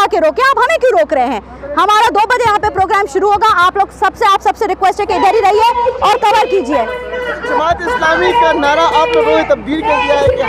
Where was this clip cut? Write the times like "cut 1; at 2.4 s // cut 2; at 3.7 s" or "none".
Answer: none